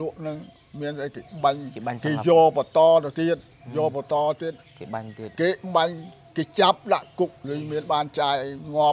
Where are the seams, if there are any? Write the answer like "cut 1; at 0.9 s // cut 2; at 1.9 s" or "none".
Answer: cut 1; at 7.4 s